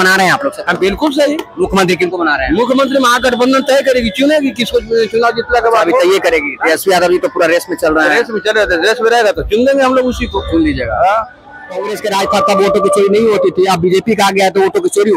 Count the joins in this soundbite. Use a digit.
1